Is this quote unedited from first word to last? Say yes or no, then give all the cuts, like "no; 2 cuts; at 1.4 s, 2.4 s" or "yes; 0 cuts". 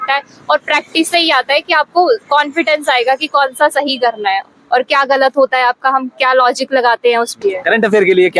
no; 1 cut; at 7.3 s